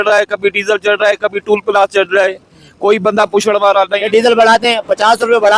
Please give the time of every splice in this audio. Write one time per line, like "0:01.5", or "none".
0:04.0